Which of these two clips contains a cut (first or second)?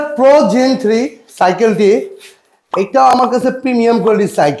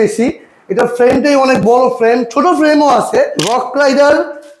second